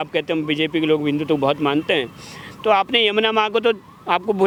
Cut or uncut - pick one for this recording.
uncut